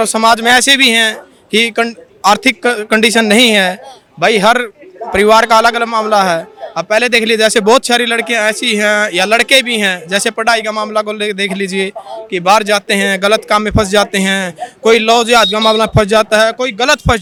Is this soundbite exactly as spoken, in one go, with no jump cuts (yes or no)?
yes